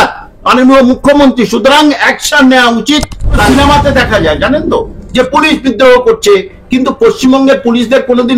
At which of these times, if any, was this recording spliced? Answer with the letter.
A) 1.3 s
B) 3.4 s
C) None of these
B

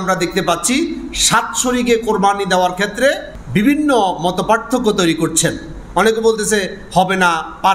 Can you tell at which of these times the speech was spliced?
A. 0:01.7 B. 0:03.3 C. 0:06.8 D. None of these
B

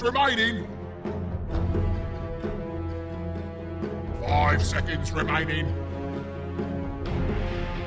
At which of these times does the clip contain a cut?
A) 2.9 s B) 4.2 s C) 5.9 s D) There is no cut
C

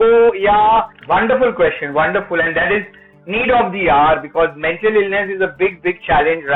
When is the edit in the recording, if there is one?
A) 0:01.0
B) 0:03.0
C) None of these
A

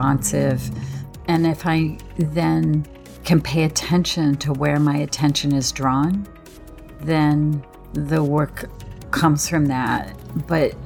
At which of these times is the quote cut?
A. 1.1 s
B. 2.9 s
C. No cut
A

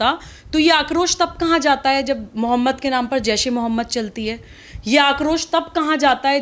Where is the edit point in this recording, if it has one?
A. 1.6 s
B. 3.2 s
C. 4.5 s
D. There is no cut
D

